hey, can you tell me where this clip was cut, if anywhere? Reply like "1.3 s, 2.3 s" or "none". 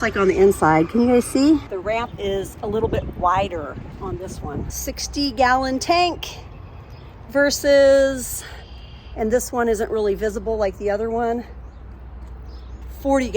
1.7 s, 4.7 s